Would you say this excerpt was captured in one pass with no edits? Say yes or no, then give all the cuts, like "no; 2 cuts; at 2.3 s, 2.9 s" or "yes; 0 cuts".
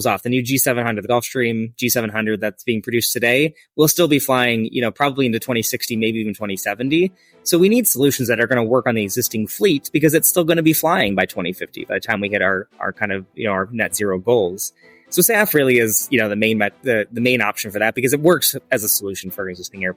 yes; 0 cuts